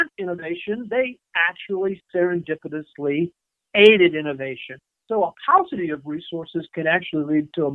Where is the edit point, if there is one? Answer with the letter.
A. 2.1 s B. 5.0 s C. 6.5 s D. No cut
B